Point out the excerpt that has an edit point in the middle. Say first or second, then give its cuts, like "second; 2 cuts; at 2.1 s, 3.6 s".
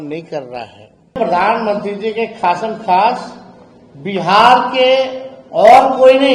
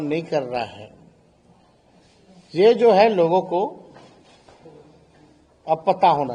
first; 1 cut; at 1.2 s